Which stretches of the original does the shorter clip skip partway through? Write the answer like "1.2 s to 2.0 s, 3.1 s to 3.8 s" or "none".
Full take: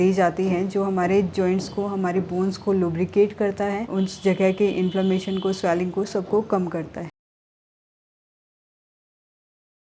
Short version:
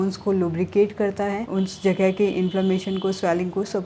none